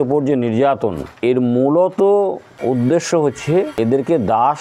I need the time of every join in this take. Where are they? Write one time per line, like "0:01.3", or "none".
0:01.1
0:02.5
0:03.9